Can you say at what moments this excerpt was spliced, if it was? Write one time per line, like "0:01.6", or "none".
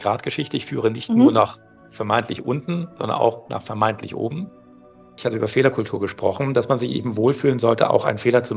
0:05.0